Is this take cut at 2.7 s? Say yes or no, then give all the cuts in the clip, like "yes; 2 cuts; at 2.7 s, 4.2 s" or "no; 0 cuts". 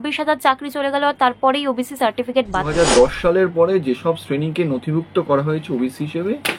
yes; 1 cut; at 2.7 s